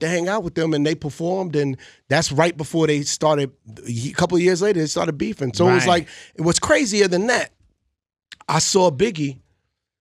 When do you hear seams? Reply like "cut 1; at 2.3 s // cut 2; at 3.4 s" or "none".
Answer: none